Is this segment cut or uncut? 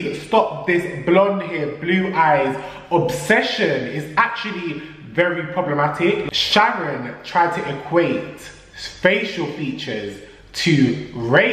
cut